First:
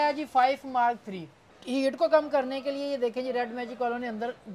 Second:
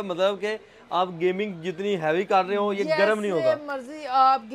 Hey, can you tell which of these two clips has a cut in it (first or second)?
first